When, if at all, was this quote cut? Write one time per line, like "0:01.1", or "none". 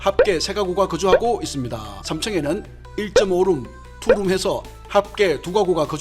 0:01.9